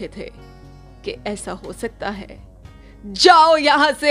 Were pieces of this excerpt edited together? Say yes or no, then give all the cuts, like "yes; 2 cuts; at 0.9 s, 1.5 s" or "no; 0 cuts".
no; 0 cuts